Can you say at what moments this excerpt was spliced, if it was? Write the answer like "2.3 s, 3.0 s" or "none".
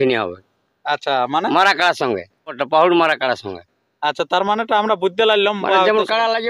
2.6 s